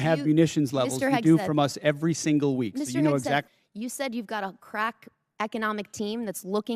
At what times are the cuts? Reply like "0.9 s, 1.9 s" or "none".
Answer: 3.5 s